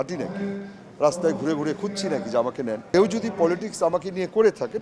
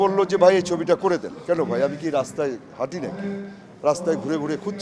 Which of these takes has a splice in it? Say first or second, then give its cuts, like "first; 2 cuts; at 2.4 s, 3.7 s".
first; 1 cut; at 2.9 s